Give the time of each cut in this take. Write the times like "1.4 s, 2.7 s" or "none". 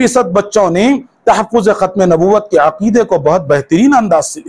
none